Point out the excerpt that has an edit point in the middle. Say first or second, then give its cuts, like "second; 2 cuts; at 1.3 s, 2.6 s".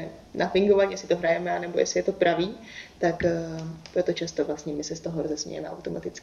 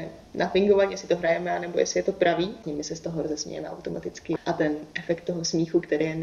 second; 2 cuts; at 2.6 s, 4.4 s